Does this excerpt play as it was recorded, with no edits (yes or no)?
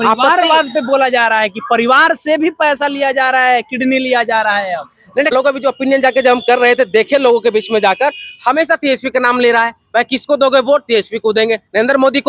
no